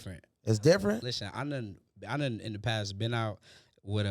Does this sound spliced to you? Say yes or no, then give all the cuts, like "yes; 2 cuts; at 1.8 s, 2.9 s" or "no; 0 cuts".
yes; 1 cut; at 1.0 s